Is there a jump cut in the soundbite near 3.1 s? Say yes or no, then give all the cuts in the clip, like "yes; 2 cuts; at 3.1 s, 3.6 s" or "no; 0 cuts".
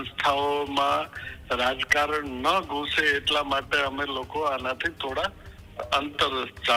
no; 0 cuts